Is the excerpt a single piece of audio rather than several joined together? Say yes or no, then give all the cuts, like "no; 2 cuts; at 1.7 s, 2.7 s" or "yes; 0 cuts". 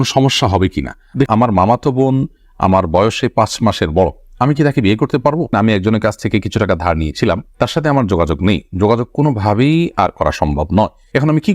no; 2 cuts; at 1.3 s, 5.5 s